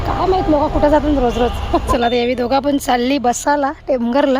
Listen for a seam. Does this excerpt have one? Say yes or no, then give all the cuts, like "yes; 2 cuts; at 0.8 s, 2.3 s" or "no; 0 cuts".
yes; 1 cut; at 1.9 s